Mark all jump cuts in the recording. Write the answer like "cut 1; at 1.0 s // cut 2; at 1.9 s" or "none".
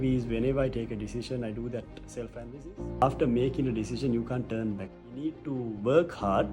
cut 1; at 3.0 s // cut 2; at 4.9 s